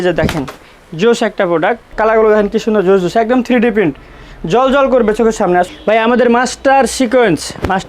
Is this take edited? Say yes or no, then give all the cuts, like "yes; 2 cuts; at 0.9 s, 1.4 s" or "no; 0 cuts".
yes; 2 cuts; at 1.9 s, 5.7 s